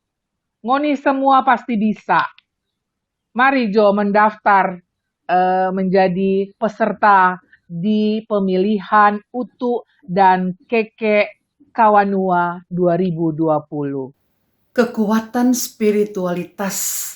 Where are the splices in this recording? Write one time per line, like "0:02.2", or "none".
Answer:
0:14.2